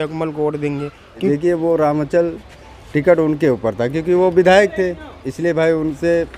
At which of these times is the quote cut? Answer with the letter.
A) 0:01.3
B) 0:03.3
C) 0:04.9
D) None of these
A